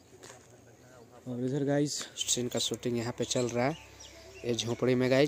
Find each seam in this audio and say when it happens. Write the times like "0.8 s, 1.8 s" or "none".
2.2 s

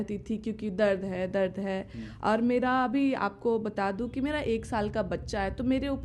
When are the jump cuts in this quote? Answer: none

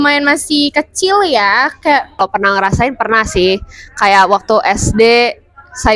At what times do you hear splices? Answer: 2.2 s

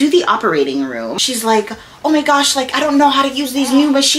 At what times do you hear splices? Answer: 1.1 s

